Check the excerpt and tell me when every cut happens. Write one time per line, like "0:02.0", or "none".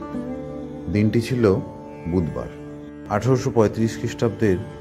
0:03.0